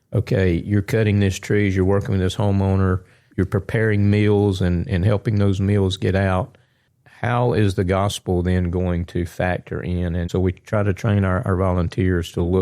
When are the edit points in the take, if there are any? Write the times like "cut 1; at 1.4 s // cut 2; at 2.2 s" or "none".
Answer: cut 1; at 3.2 s // cut 2; at 10.3 s